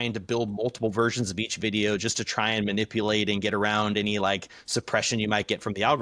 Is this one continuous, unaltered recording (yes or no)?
yes